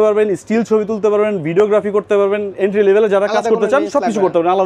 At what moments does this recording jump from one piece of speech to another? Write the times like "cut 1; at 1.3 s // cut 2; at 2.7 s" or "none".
none